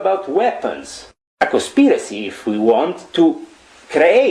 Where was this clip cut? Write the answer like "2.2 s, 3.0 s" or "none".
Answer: 1.2 s